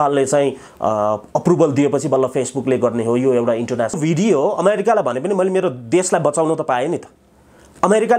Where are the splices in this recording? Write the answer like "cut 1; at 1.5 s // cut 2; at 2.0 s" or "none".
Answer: cut 1; at 4.0 s